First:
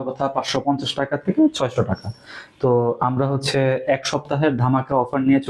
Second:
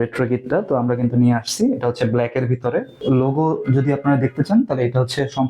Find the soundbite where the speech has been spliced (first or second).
second